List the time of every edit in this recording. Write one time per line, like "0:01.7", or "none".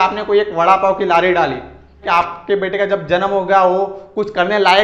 0:02.0